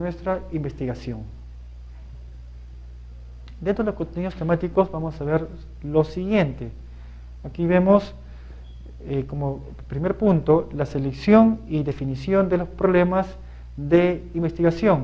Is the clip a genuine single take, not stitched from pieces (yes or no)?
yes